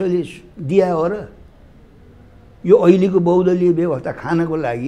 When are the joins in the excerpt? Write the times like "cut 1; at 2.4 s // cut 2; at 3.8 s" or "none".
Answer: none